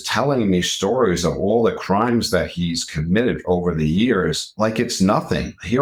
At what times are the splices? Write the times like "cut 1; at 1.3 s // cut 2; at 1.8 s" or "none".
none